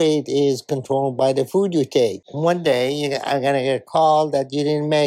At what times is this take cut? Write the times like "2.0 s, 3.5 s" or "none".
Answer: 2.2 s

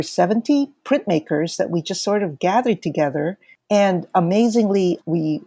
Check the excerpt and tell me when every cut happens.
3.5 s

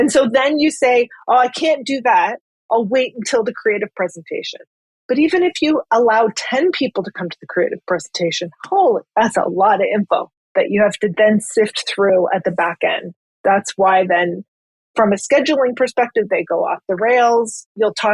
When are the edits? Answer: 10.4 s

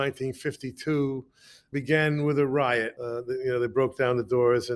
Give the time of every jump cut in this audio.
1.6 s, 2.9 s

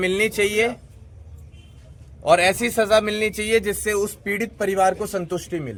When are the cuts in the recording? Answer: none

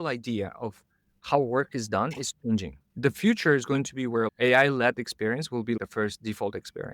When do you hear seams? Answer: 2.8 s, 4.3 s, 5.8 s

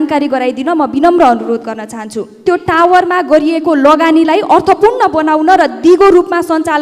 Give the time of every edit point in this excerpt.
2.4 s

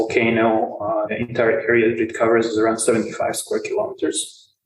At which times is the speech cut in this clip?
1.1 s

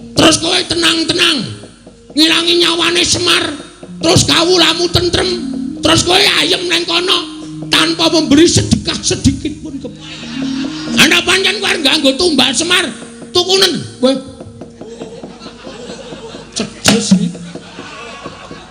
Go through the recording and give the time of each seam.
10.9 s

